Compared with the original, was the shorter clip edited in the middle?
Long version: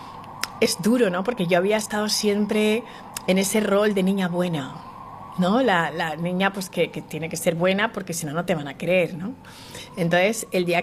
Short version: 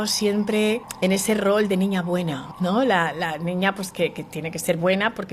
yes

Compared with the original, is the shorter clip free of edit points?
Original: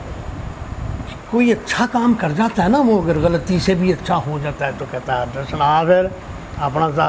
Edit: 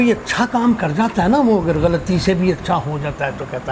yes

